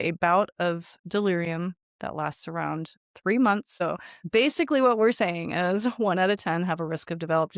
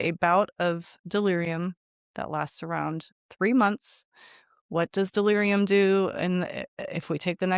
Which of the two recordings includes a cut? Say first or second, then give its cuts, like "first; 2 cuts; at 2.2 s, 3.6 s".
first; 2 cuts; at 1.9 s, 3.7 s